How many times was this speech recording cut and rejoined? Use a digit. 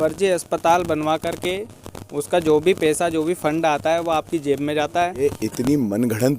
1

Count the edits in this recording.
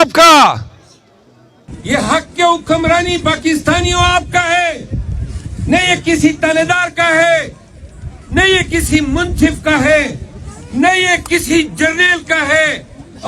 1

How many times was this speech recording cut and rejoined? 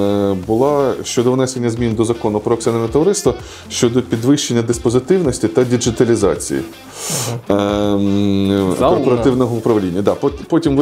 0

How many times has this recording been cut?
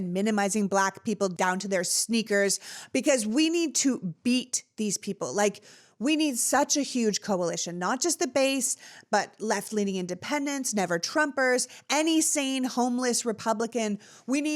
1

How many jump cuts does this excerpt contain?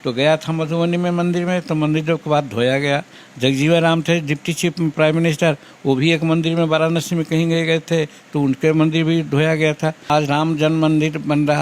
1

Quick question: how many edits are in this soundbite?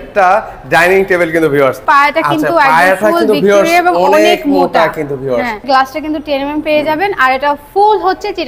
2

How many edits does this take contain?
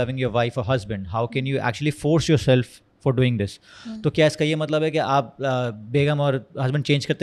0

